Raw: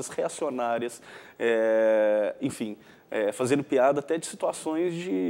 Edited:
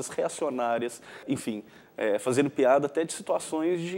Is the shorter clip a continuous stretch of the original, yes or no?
no